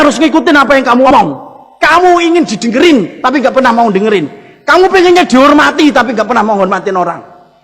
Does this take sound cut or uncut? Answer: cut